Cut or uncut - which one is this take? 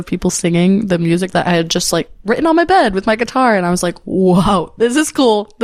uncut